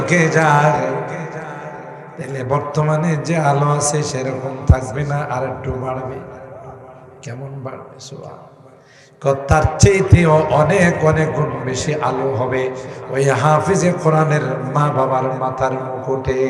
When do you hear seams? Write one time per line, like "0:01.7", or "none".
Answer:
none